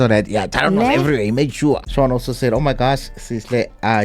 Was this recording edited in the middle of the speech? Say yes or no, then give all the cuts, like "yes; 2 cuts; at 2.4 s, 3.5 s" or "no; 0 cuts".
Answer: yes; 1 cut; at 1.9 s